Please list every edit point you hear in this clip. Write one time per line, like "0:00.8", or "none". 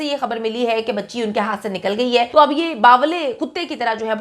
0:02.3